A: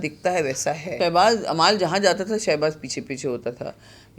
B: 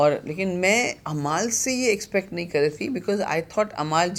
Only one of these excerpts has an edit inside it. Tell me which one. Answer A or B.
A